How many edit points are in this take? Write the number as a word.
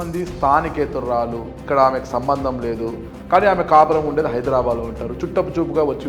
two